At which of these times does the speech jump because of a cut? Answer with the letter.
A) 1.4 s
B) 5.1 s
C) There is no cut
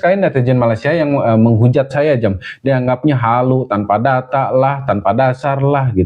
C